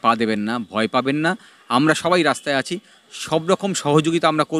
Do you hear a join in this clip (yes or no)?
no